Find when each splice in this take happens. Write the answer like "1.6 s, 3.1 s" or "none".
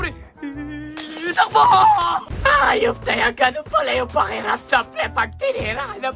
2.3 s